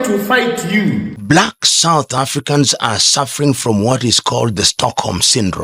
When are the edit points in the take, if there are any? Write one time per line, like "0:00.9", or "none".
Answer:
0:01.1